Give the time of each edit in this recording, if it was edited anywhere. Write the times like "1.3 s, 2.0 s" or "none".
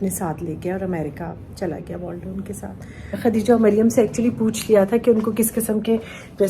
3.1 s